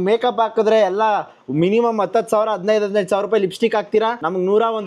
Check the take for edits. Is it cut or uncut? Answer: uncut